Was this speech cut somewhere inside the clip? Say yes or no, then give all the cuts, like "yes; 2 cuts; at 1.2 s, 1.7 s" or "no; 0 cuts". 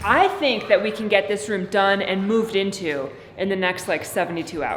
no; 0 cuts